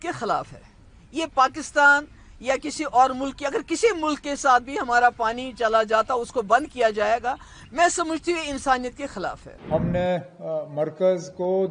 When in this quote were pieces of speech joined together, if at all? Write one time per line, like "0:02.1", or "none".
0:09.5